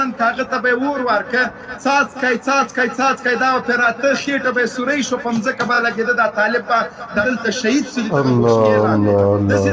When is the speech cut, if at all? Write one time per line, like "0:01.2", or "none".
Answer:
0:07.2